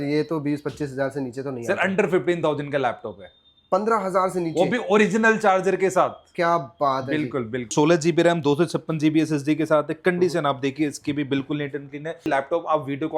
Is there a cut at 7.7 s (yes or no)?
yes